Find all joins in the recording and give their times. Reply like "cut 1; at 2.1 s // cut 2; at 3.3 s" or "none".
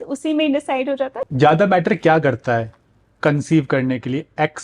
cut 1; at 1.2 s